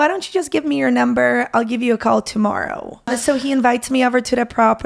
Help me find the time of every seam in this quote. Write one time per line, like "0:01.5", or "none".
0:03.1